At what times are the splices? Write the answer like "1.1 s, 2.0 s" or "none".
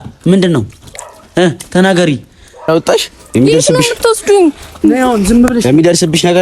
2.7 s